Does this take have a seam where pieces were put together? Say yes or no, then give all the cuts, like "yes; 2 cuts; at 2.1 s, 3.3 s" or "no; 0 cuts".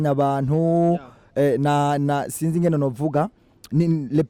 no; 0 cuts